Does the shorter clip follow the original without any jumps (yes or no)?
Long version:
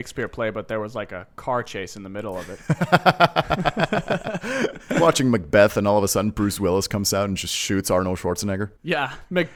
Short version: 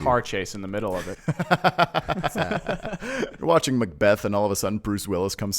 no